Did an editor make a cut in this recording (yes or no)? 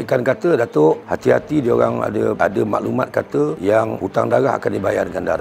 no